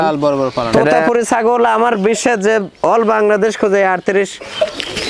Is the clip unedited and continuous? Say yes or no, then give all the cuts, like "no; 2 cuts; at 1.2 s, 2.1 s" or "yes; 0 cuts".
no; 1 cut; at 1.0 s